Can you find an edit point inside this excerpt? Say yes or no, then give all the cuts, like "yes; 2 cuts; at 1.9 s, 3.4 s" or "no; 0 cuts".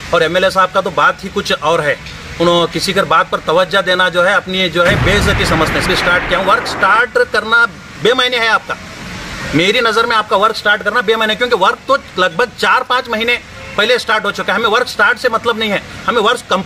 yes; 1 cut; at 5.8 s